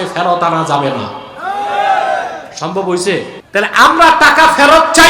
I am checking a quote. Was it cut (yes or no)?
yes